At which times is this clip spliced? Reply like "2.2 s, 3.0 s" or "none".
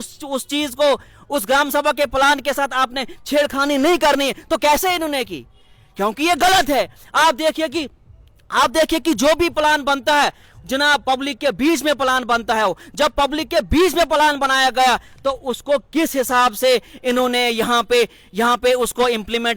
none